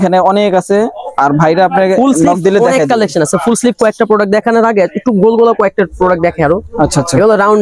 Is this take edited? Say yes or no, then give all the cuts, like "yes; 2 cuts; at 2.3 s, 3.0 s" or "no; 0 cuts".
no; 0 cuts